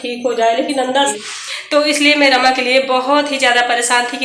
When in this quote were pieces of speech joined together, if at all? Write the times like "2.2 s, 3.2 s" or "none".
1.1 s